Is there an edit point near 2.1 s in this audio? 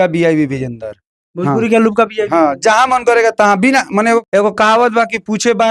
no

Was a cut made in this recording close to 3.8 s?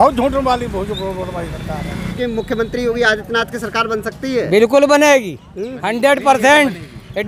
no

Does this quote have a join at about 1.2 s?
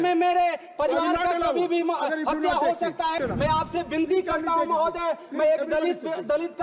no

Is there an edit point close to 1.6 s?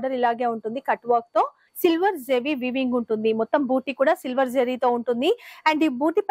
yes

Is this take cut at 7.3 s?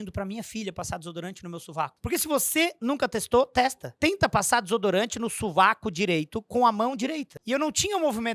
yes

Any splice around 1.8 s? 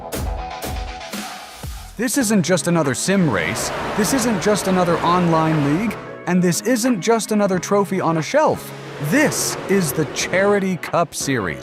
yes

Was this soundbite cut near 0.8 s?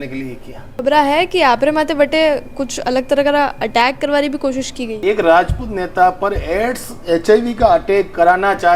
yes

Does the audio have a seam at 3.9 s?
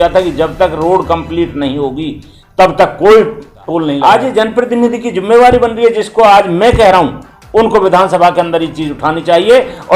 yes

